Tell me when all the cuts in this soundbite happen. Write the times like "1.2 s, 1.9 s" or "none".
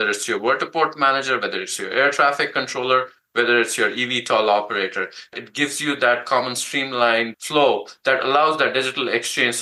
5.4 s, 7.4 s